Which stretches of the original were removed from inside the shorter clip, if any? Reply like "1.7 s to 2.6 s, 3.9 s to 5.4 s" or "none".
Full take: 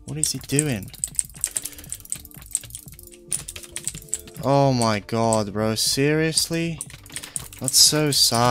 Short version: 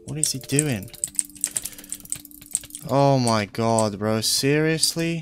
2.7 s to 4.2 s

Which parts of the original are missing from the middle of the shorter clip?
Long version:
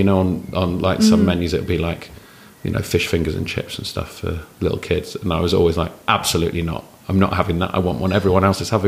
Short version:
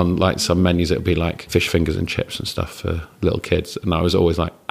2.1 s to 2.9 s

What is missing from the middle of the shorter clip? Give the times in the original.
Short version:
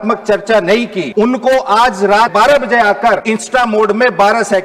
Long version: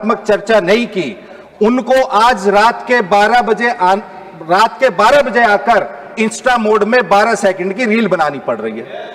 1.0 s to 1.4 s, 2.8 s to 5.0 s, 5.9 s to 6.2 s

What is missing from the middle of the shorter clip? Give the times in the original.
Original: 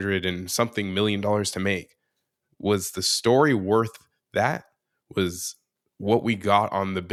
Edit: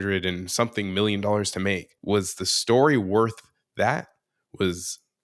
1.9 s to 2.5 s

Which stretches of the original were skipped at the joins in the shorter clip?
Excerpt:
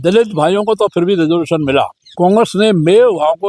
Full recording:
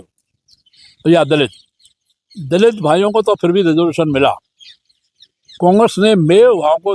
4.5 s to 5.4 s

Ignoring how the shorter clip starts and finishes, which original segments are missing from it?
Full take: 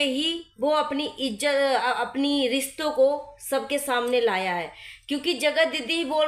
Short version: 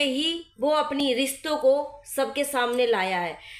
1.0 s to 2.3 s

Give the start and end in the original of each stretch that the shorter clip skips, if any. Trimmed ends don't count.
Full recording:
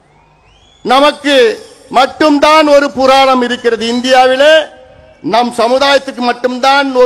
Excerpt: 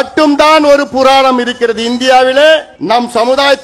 4.8 s to 5.2 s

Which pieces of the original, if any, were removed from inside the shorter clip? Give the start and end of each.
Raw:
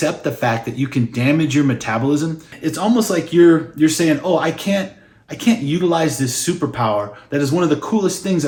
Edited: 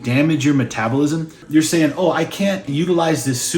2.5 s to 3.7 s, 5.0 s to 5.6 s

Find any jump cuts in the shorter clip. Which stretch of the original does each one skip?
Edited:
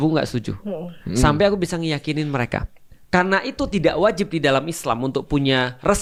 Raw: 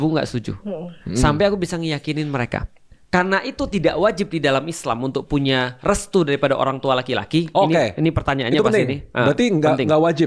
none

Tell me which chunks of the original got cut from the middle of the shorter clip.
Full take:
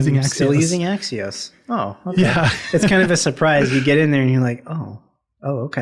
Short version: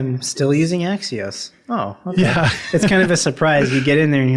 none

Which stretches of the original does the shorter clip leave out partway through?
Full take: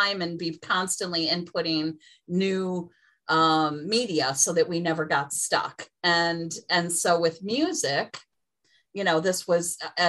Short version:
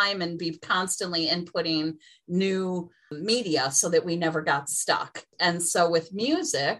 3.2 s to 3.8 s, 5.9 s to 6.5 s

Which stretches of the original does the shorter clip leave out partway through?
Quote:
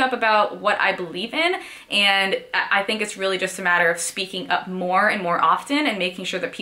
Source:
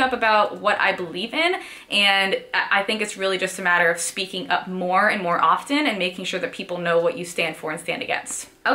none

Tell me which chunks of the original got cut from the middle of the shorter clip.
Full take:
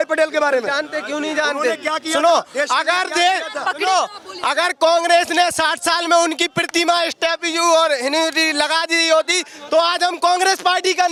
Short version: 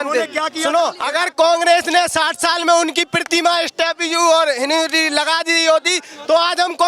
2.5 s to 4.4 s

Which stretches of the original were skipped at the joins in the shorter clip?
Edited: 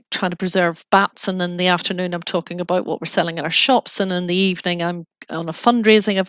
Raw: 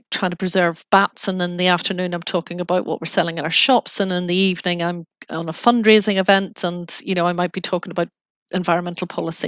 none

